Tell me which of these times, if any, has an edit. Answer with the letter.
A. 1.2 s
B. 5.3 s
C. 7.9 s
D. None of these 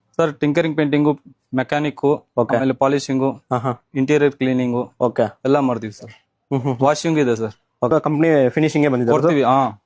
C